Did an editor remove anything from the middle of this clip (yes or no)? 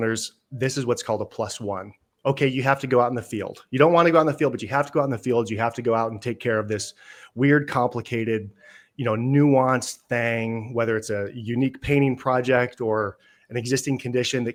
no